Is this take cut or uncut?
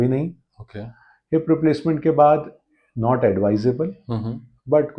uncut